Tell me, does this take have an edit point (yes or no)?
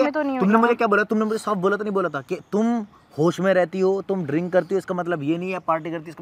no